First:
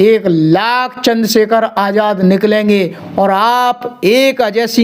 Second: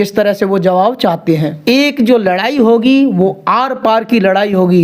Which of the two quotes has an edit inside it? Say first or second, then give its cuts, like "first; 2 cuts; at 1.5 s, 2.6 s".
second; 1 cut; at 1.5 s